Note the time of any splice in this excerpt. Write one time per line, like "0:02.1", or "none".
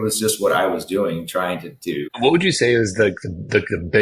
0:02.1